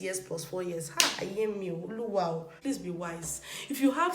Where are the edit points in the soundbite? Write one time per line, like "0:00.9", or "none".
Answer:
0:02.4

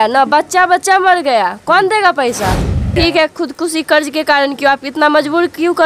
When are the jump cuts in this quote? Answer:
0:02.9

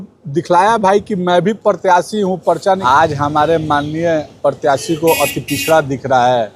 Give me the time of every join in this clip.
0:02.8

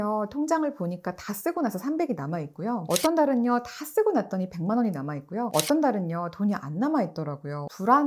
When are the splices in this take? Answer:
none

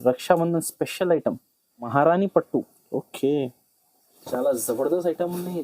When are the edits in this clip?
0:01.9

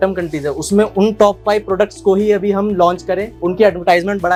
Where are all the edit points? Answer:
none

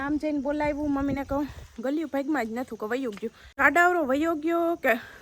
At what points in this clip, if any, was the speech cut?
0:03.6

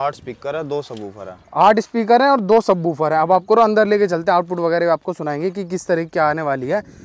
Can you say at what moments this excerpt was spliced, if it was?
none

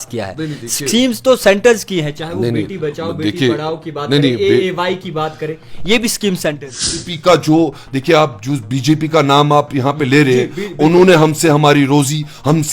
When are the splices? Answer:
0:06.9

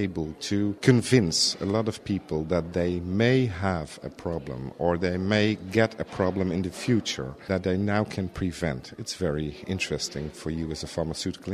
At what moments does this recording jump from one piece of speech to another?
0:00.8
0:07.4

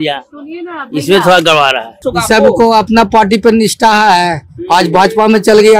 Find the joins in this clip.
0:02.1

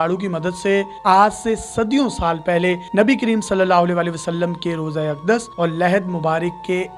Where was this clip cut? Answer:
0:00.9

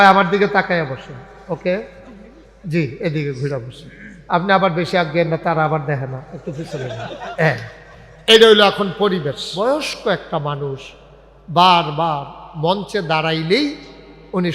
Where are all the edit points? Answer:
0:09.4

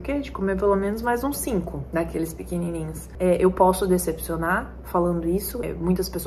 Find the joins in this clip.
0:03.0

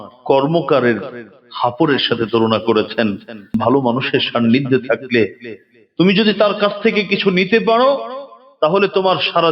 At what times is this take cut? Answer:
0:03.5

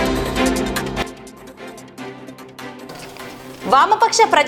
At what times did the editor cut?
0:01.8

